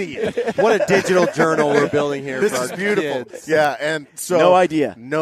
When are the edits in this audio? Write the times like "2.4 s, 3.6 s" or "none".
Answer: none